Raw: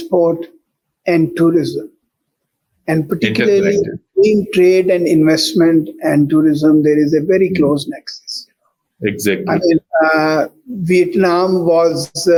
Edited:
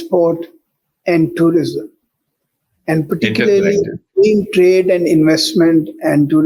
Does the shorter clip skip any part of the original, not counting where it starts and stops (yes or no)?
no